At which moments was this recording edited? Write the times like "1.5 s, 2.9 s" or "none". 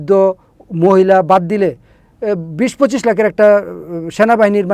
none